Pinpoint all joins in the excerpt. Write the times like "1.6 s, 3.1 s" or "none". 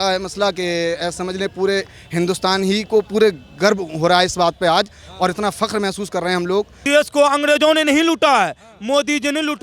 6.8 s